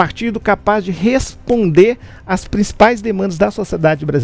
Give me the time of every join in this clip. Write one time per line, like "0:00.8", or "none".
none